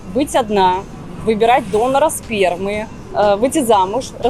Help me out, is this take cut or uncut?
cut